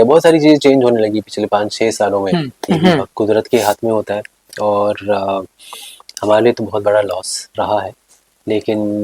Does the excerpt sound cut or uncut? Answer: cut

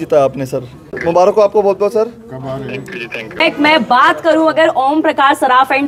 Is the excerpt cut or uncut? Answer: cut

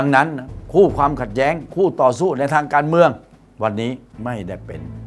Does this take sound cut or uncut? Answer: cut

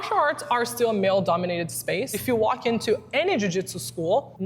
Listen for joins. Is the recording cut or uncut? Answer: cut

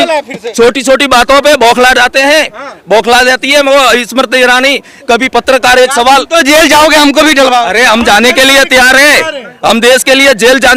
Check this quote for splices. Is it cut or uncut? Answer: uncut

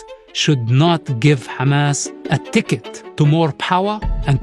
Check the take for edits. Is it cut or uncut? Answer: cut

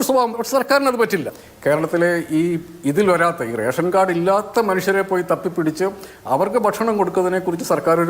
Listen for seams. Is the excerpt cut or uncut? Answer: cut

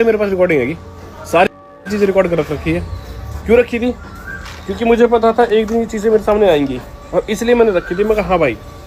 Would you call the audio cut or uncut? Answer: uncut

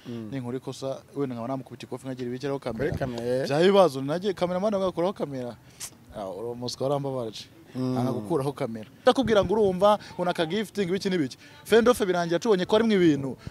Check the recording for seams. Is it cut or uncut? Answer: cut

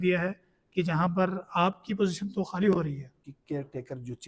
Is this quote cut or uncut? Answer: cut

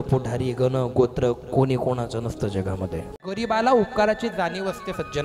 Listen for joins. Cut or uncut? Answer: cut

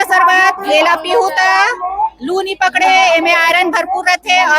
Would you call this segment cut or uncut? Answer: uncut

